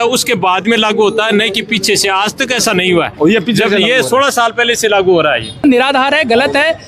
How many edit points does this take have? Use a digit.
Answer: 1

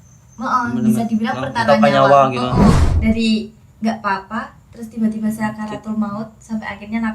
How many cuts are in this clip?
1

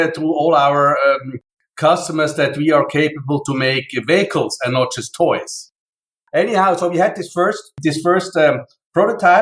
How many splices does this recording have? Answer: 1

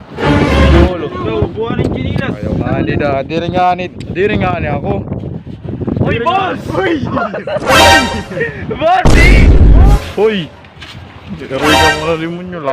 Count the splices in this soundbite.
2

